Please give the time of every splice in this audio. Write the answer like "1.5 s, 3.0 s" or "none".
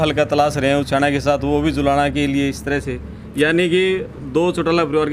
none

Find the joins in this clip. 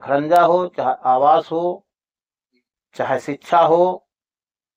none

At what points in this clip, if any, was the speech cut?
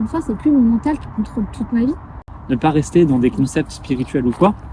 2.3 s

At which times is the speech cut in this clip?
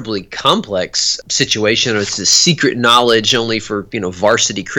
1.2 s

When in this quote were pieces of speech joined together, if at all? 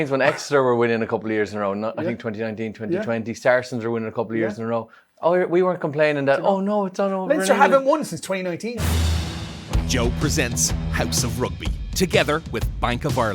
8.8 s

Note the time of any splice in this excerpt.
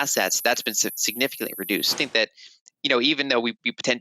1.9 s

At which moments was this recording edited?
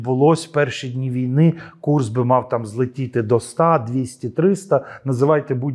none

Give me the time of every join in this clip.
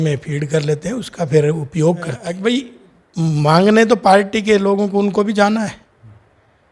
2.4 s

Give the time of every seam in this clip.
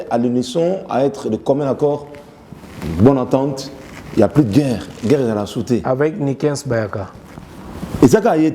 none

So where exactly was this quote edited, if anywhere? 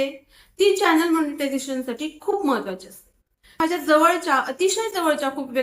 3.6 s

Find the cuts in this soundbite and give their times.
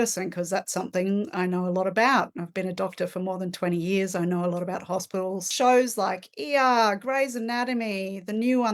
5.5 s

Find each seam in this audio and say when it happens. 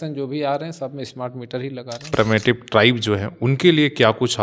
2.1 s

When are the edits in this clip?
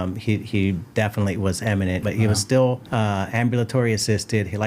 2.0 s, 2.8 s

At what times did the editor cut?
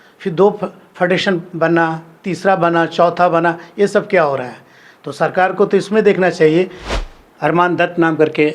6.8 s

